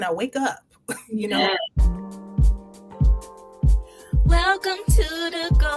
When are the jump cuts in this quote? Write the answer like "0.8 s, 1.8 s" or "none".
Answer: 1.9 s